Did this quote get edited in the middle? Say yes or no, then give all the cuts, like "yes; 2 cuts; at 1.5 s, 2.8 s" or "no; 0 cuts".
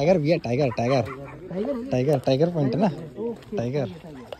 no; 0 cuts